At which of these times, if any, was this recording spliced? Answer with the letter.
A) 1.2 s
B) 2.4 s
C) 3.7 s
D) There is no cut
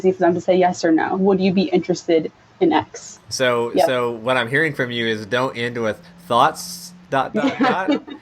A